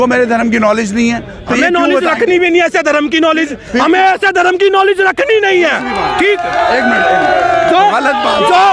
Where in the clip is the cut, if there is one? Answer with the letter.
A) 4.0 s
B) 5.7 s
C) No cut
C